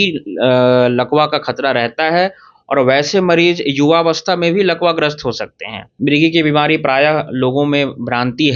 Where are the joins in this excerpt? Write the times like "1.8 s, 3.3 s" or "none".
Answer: 5.9 s